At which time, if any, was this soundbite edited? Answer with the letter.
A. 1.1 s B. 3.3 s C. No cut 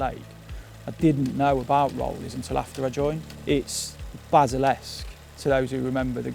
B